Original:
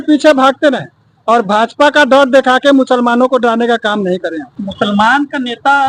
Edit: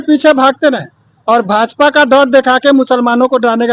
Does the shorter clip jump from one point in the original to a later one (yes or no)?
no